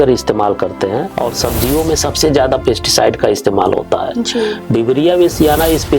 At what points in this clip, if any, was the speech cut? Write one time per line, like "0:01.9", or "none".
0:01.1
0:04.6